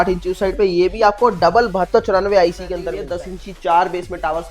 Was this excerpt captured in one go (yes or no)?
no